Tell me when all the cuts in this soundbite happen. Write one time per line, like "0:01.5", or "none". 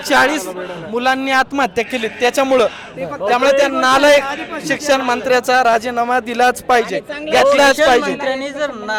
none